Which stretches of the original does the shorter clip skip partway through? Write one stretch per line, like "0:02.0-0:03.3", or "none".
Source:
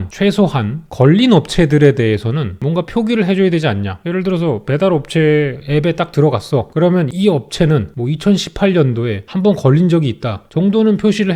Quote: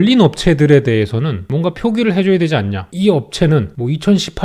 0:04.0-0:07.1

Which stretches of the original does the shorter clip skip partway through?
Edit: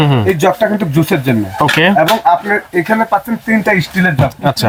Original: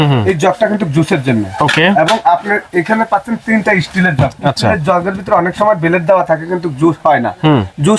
none

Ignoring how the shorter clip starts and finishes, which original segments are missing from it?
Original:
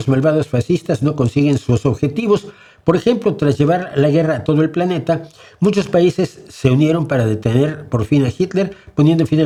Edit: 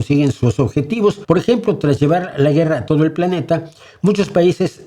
0:02.5-0:02.8

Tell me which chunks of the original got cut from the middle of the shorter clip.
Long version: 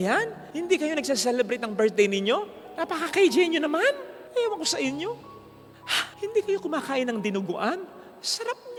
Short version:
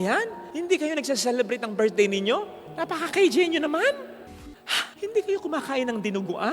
0:04.1-0:05.3

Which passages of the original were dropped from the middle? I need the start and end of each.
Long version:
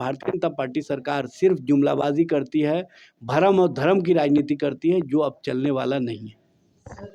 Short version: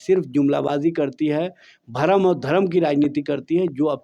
none

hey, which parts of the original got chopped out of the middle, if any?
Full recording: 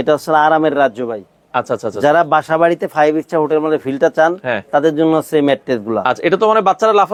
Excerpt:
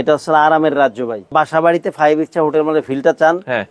0:01.3-0:02.3

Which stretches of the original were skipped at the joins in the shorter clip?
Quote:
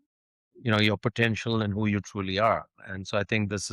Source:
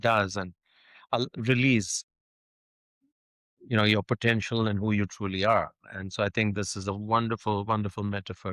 none

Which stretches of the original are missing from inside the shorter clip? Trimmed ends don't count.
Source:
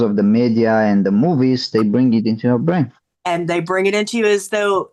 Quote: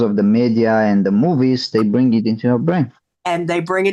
none

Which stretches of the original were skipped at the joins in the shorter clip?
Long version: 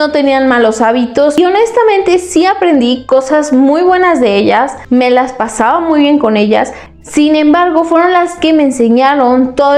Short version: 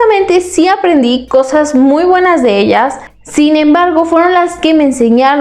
0:04.8-0:06.8

